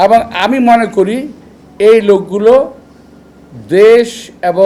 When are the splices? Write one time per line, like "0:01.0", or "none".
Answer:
none